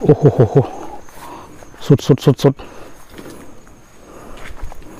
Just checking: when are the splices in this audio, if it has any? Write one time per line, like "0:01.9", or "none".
none

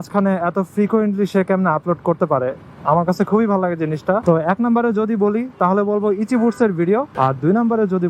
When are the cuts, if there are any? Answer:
0:04.2
0:07.1

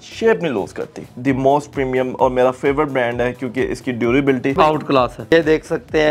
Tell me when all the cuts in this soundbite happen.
0:01.1
0:04.7

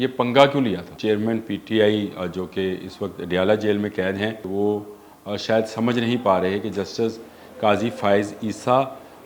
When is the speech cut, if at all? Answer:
0:00.9
0:04.5

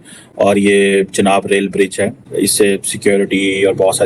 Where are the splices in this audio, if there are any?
none

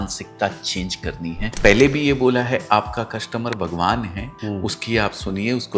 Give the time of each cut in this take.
0:01.5
0:04.2

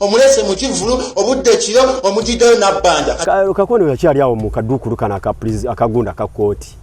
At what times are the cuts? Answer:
0:03.2

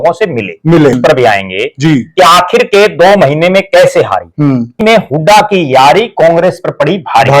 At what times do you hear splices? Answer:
0:01.0
0:04.8

